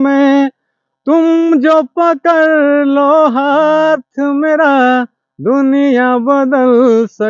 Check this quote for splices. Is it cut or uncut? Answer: uncut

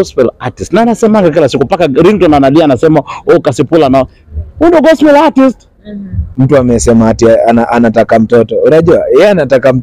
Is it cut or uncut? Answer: cut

